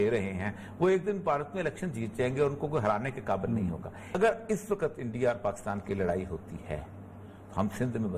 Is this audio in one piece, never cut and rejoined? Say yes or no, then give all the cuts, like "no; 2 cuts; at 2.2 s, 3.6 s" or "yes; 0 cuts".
no; 1 cut; at 4.2 s